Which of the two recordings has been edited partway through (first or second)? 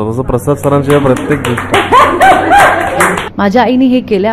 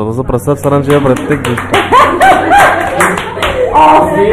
first